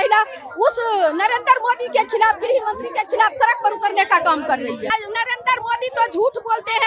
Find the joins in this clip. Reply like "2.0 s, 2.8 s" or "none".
4.9 s